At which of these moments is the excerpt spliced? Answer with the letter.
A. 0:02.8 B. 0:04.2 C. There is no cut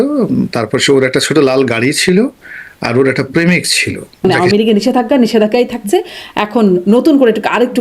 B